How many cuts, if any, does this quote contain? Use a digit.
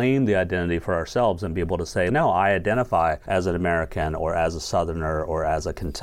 2